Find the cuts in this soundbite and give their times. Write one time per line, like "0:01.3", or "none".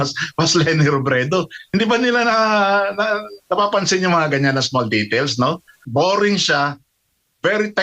0:05.7